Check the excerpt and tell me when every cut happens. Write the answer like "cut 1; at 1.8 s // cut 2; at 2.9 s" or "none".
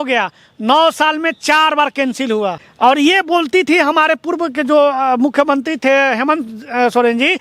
cut 1; at 2.6 s